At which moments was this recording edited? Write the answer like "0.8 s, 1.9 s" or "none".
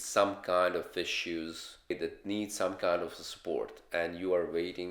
1.9 s